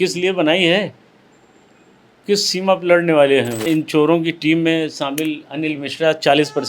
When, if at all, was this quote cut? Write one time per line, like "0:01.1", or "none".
0:03.7